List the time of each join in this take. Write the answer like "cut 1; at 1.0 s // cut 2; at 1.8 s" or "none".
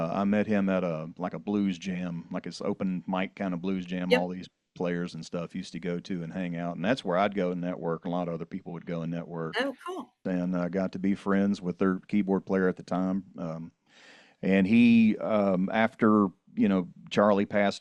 cut 1; at 10.2 s